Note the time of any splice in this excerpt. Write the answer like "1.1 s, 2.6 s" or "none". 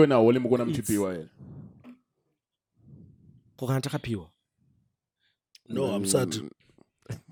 none